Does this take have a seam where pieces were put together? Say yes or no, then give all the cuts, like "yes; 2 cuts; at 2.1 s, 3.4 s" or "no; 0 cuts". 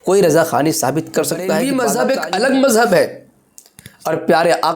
yes; 1 cut; at 1.7 s